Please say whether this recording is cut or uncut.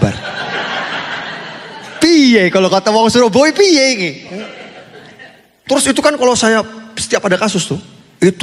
uncut